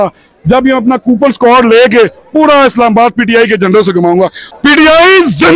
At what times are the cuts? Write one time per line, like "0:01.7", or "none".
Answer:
0:04.4

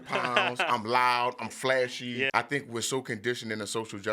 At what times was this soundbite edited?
0:02.3

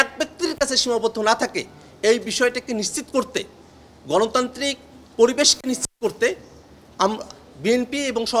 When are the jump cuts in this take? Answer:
none

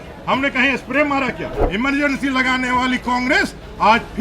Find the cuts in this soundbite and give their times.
0:01.6

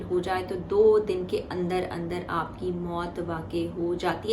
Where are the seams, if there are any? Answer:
none

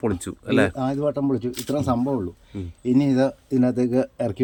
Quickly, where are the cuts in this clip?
none

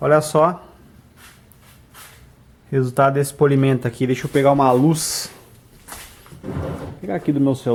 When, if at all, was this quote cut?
none

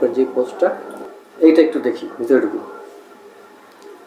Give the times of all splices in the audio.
none

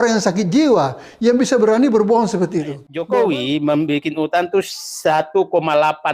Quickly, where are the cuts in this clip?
0:03.0

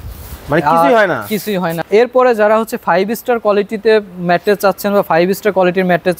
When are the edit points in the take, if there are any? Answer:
0:01.7

